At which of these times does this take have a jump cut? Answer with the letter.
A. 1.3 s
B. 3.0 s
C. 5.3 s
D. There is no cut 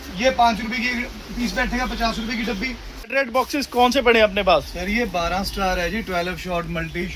B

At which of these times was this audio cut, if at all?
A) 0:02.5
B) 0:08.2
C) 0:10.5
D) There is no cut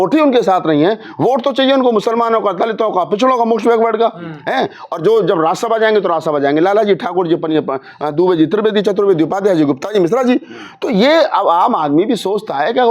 D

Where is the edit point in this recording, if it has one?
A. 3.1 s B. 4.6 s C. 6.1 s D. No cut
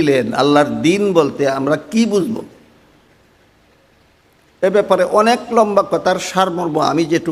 D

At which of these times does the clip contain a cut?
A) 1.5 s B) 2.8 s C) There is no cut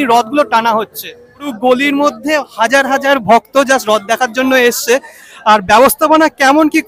A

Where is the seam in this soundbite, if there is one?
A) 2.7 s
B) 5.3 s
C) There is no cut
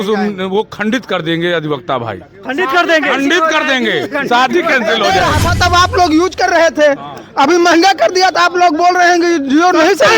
B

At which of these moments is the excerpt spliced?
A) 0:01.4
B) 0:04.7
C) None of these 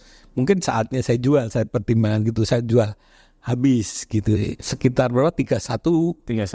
B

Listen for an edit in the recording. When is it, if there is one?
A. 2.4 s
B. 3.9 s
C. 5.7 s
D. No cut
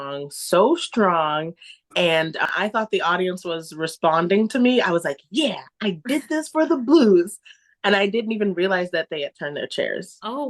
A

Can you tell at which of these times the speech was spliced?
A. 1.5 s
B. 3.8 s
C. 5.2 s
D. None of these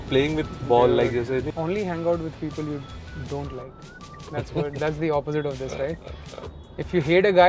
A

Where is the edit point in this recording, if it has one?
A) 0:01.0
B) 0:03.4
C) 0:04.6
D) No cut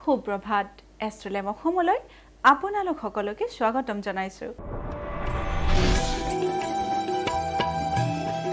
C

